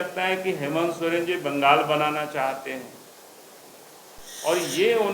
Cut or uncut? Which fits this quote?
cut